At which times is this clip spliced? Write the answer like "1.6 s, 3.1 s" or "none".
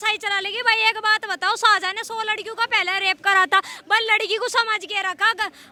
none